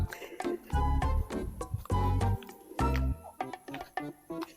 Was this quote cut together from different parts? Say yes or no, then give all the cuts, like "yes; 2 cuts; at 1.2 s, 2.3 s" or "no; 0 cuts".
no; 0 cuts